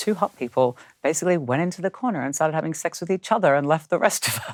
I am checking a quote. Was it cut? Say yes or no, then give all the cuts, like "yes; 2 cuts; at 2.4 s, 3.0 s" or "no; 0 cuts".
no; 0 cuts